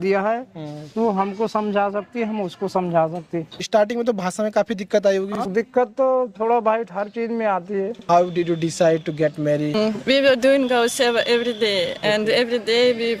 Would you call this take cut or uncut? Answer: cut